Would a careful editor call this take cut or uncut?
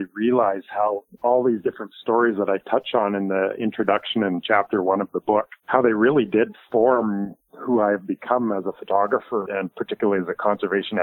cut